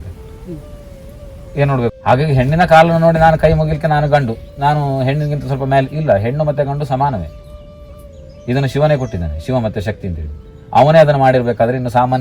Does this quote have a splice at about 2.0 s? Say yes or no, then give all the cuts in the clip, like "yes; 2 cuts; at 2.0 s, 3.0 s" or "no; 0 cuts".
yes; 1 cut; at 2.0 s